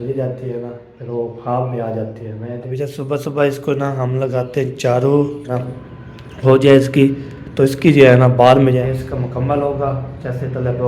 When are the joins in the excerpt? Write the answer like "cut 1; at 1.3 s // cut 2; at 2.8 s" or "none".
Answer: cut 1; at 2.6 s // cut 2; at 5.6 s // cut 3; at 8.8 s